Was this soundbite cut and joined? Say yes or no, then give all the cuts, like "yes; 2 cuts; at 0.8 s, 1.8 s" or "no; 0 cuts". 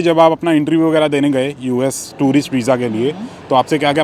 no; 0 cuts